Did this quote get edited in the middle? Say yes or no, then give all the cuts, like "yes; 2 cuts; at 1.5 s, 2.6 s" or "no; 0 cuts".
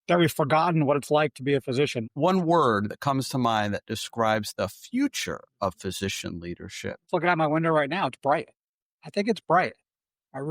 yes; 2 cuts; at 2.1 s, 7.0 s